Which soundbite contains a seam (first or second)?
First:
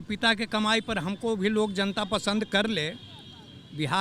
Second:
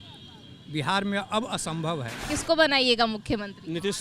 second